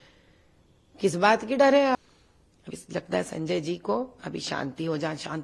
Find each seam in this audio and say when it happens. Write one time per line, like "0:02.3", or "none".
0:01.9